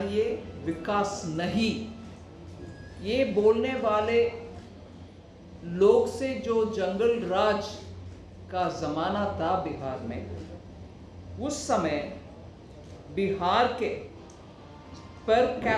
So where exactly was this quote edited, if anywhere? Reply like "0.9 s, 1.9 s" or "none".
none